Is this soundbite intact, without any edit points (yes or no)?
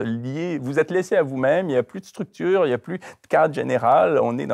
yes